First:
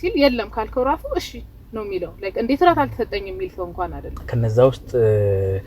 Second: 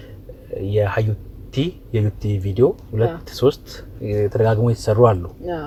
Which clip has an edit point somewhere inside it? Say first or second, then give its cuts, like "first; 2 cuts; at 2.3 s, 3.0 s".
first; 1 cut; at 4.3 s